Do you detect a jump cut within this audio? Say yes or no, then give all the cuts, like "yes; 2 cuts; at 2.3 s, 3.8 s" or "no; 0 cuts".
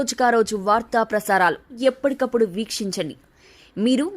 yes; 1 cut; at 1.7 s